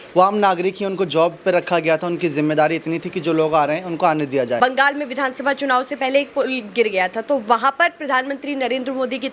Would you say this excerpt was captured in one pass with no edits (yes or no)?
no